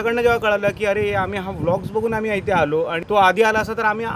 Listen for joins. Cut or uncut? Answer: cut